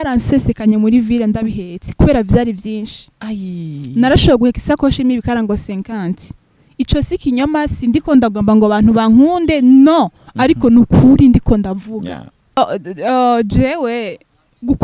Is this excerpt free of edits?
no; 1 cut; at 12.6 s

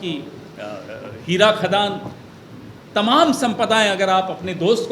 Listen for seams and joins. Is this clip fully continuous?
yes; 0 cuts

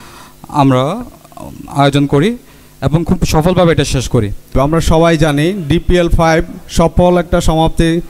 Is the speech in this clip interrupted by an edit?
yes; 1 cut; at 4.5 s

